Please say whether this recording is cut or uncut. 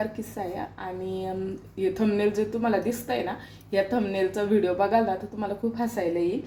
uncut